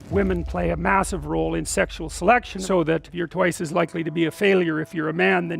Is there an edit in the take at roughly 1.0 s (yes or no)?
no